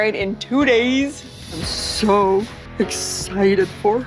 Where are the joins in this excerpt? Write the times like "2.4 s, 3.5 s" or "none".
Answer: 2.6 s